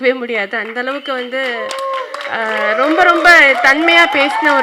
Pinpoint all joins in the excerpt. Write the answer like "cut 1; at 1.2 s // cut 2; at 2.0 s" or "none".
none